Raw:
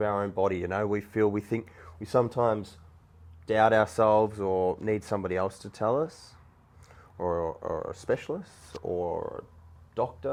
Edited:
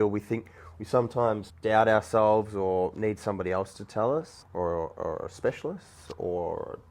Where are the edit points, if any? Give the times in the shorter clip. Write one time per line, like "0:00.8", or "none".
0:01.5
0:04.4